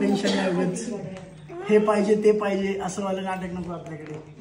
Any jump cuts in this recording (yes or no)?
no